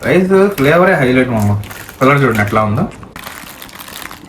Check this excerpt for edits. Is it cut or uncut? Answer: cut